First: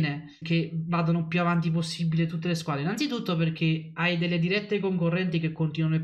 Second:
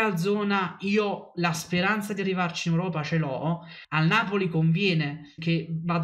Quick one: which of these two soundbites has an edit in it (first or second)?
second